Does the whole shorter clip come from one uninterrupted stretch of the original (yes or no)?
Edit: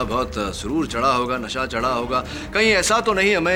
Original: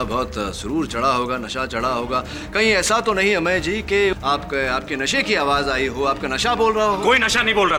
yes